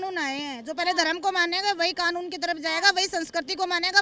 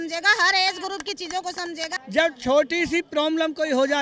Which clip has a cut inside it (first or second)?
second